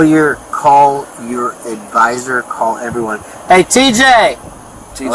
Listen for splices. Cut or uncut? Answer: uncut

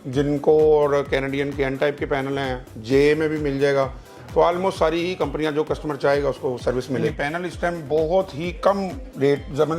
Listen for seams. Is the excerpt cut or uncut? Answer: cut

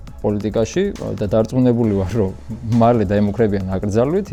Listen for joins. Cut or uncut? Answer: uncut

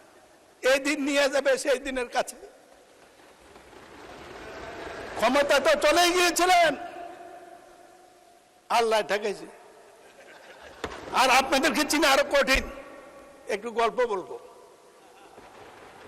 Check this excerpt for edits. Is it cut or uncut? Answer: cut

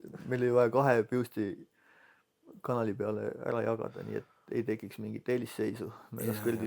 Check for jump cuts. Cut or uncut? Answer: uncut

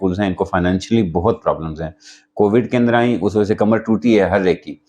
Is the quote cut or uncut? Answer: uncut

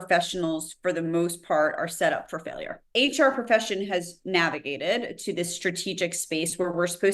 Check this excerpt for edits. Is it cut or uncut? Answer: cut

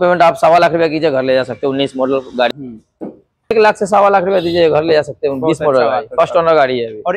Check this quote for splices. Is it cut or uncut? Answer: cut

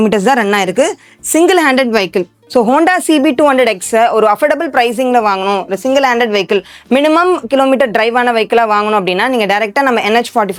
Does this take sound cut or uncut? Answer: uncut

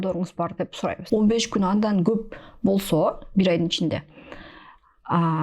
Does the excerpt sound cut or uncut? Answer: cut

